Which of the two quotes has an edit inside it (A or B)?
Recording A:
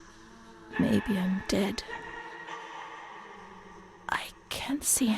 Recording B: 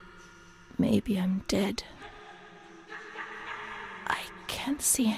A